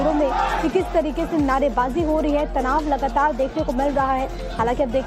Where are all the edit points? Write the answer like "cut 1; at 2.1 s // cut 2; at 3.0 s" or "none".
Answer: cut 1; at 1.1 s